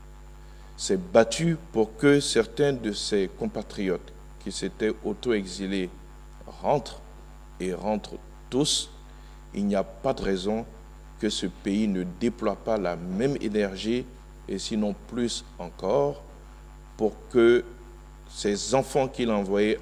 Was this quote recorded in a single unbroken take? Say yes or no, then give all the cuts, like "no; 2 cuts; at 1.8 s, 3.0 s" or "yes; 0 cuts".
yes; 0 cuts